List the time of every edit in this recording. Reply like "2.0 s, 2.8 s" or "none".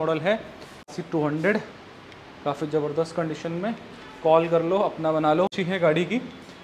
0.9 s, 5.6 s